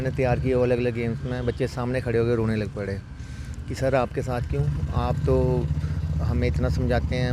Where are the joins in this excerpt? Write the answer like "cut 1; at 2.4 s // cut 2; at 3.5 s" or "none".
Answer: none